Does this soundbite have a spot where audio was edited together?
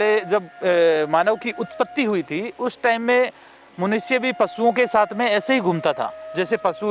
no; 0 cuts

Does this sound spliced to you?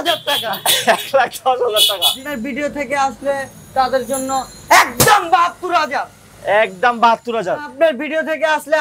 yes; 2 cuts; at 2.3 s, 7.7 s

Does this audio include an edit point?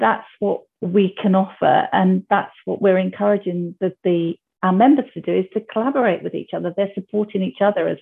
no; 0 cuts

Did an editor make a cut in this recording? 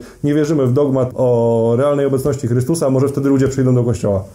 yes; 1 cut; at 1.1 s

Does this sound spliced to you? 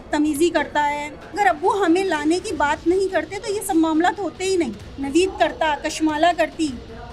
yes; 2 cuts; at 1.3 s, 4.9 s

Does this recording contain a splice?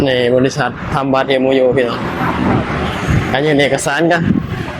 no; 0 cuts

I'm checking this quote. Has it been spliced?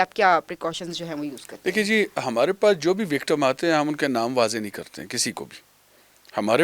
no; 0 cuts

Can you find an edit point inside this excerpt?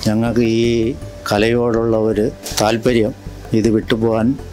yes; 1 cut; at 2.4 s

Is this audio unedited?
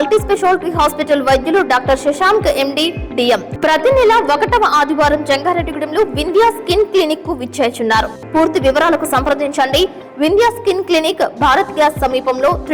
no; 2 cuts; at 3.5 s, 8.2 s

